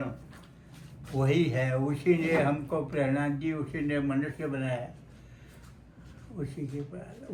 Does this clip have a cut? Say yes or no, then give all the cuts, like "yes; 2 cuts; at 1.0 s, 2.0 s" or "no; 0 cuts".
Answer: no; 0 cuts